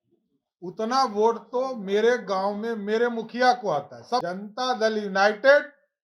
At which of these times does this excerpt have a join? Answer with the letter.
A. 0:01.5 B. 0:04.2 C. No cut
B